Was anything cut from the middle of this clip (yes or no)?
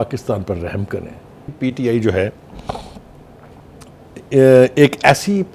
yes